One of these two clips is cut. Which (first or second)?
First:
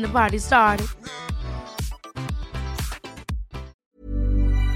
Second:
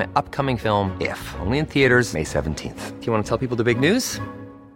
first